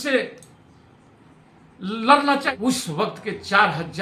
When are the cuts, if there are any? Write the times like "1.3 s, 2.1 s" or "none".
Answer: 2.5 s